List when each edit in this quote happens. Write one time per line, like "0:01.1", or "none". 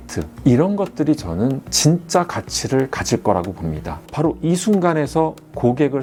none